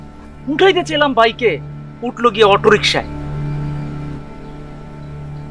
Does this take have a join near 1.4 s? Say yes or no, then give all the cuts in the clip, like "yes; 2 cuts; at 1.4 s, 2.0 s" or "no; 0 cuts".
no; 1 cut; at 4.1 s